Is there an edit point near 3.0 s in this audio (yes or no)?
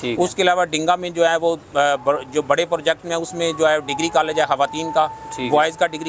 no